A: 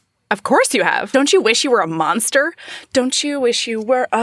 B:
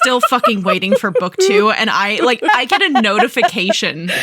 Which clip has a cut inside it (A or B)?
B